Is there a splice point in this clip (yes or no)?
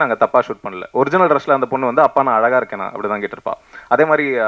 no